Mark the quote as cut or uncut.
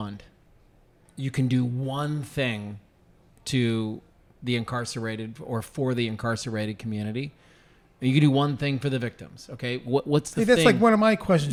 uncut